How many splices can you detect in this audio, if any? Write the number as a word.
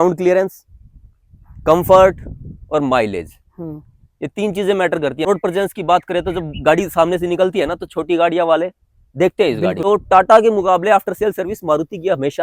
two